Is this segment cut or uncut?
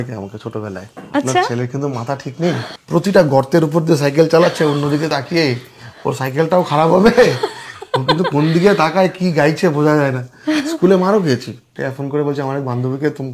cut